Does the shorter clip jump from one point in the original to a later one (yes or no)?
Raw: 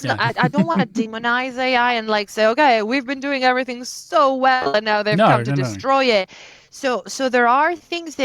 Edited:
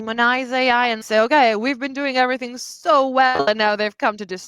yes